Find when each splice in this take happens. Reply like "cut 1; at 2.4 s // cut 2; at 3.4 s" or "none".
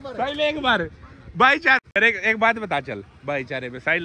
cut 1; at 1.9 s